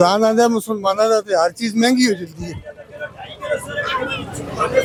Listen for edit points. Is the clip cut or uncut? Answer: uncut